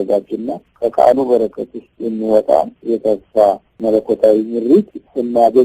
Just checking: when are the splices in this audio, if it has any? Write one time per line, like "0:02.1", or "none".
0:03.7